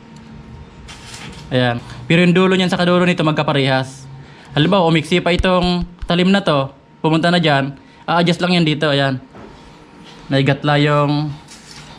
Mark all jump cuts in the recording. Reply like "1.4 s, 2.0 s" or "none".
1.9 s